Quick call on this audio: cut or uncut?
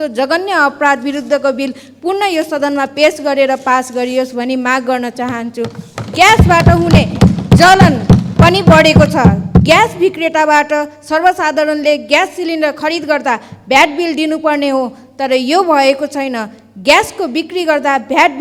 uncut